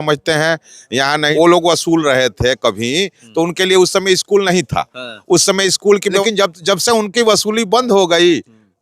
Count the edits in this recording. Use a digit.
2